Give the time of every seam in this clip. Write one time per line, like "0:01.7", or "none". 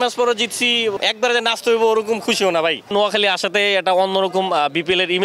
0:01.0
0:02.9